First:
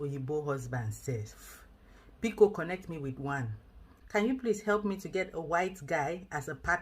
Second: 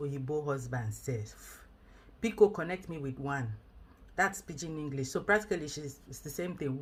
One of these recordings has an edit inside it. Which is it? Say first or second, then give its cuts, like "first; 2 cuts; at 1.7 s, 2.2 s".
first; 1 cut; at 4.0 s